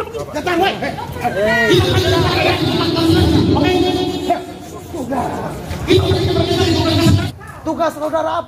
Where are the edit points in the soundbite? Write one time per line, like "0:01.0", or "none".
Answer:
0:07.2